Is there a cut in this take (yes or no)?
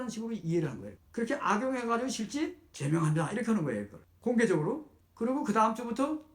yes